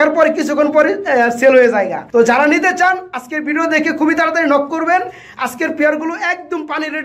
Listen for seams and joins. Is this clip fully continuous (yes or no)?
no